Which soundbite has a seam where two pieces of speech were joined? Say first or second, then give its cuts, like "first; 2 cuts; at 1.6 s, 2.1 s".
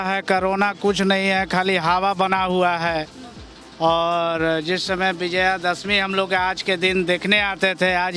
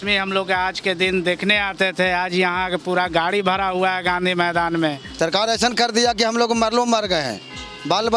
second; 1 cut; at 5.1 s